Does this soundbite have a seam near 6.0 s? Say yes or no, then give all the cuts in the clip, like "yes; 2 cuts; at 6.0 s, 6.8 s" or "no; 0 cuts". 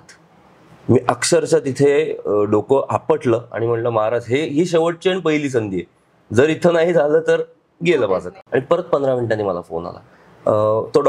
no; 1 cut; at 8.4 s